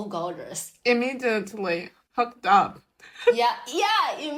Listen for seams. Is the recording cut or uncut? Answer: uncut